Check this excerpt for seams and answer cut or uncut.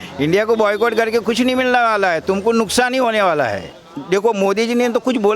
cut